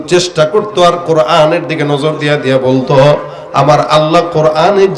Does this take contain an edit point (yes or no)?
no